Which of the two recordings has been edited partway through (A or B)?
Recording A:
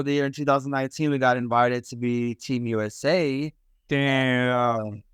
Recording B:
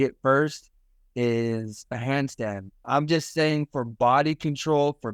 B